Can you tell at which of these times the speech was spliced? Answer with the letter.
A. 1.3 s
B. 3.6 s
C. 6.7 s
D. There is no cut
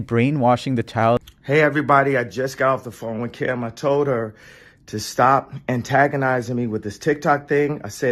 A